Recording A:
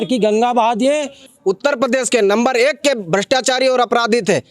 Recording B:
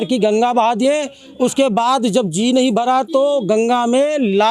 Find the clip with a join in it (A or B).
A